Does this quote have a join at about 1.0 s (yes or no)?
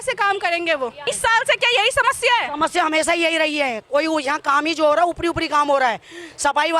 yes